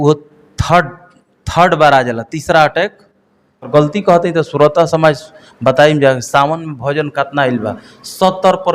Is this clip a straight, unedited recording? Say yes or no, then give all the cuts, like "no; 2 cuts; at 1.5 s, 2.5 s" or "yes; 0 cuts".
no; 1 cut; at 3.7 s